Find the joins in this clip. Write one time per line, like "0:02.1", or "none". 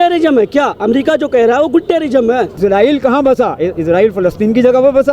0:02.5